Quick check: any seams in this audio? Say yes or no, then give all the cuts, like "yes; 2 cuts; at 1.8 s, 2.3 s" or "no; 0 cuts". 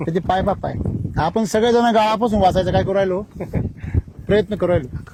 no; 0 cuts